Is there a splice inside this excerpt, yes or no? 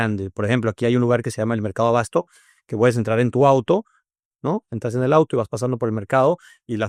no